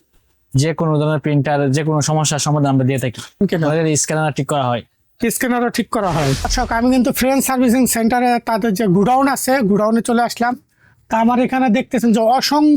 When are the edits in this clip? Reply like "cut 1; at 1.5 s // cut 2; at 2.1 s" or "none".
cut 1; at 3.4 s // cut 2; at 6.5 s